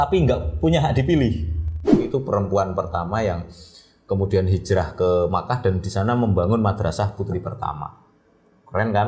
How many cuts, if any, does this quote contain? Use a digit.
1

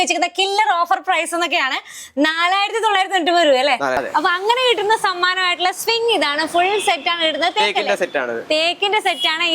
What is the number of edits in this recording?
1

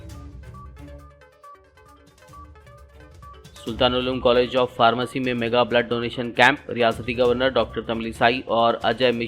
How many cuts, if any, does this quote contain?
1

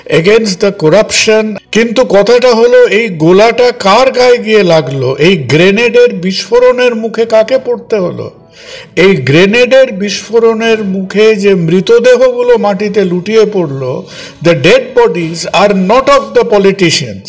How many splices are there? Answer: 1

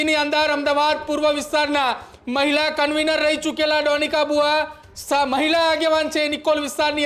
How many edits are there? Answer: 0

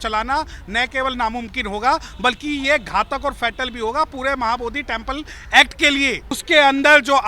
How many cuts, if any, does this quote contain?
1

